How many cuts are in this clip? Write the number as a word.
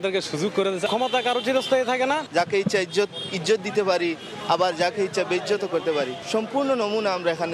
three